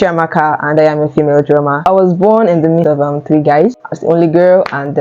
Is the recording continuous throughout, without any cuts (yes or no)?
no